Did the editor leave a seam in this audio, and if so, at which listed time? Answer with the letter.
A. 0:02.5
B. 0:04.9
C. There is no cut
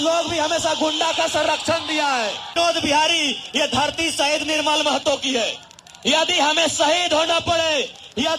A